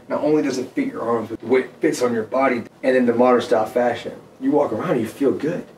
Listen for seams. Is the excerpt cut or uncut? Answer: cut